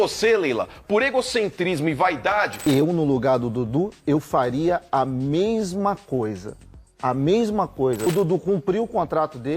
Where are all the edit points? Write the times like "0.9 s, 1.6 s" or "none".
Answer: 2.5 s, 8.1 s